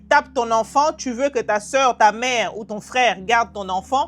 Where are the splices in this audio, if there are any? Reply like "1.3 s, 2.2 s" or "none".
none